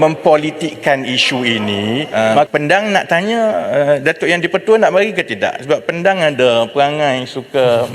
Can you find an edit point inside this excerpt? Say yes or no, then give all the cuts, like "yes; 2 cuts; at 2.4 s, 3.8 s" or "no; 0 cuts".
yes; 1 cut; at 2.5 s